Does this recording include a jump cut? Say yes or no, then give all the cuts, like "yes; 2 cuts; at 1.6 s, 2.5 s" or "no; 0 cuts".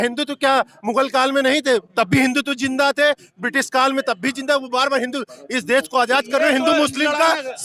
no; 0 cuts